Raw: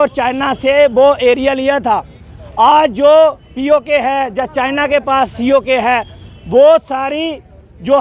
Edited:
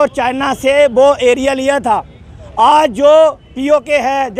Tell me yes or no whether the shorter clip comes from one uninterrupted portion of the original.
yes